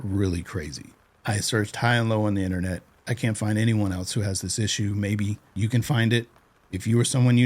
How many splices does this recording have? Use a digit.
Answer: 2